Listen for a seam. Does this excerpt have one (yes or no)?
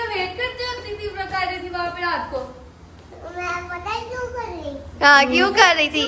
no